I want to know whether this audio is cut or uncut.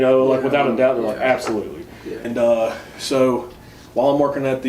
cut